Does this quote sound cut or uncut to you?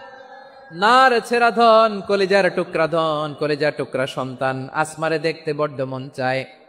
uncut